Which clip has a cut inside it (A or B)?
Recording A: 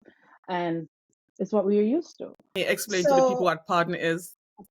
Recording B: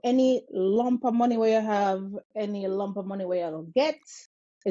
A